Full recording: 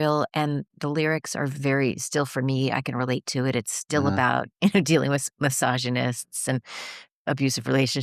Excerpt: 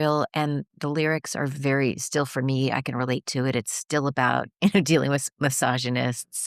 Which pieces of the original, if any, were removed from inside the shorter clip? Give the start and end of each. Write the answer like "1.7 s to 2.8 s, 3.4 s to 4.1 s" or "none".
none

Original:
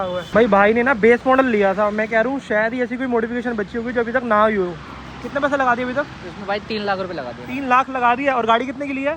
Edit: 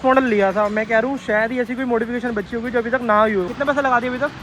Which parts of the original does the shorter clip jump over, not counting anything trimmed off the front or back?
4.7 s to 5.3 s

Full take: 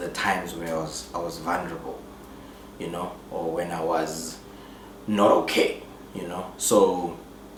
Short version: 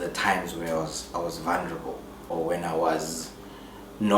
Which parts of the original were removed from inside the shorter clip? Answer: 2.3 s to 3.4 s

